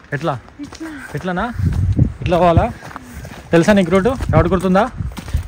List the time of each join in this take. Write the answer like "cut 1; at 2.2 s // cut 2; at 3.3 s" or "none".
none